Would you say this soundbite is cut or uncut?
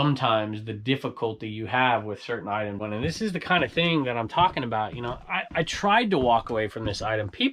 cut